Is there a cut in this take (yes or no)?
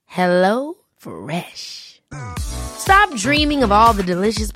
no